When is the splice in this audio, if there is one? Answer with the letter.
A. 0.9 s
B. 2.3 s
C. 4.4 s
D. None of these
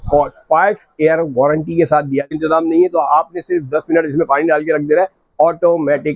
B